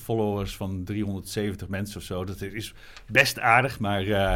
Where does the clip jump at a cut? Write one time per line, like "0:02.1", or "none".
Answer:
none